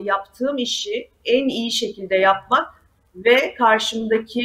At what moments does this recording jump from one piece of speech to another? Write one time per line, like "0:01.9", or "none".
none